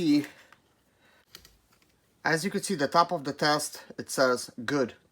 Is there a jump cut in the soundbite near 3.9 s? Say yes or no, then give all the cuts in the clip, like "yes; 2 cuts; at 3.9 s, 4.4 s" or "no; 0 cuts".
no; 1 cut; at 1.2 s